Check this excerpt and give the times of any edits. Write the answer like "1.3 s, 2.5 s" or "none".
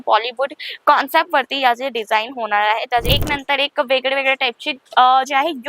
3.1 s